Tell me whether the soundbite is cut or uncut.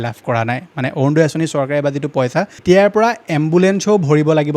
cut